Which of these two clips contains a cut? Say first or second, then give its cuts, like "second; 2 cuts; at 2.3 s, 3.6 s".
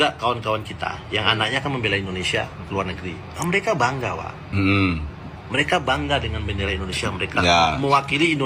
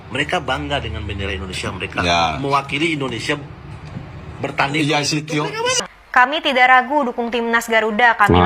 second; 1 cut; at 5.8 s